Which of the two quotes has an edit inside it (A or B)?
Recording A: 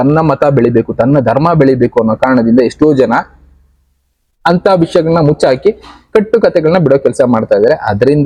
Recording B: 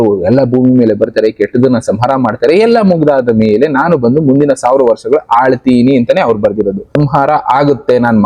B